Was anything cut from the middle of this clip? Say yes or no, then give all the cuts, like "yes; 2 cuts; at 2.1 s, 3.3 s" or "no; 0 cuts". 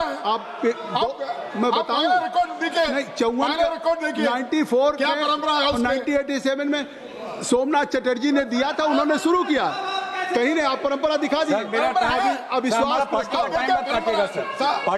no; 0 cuts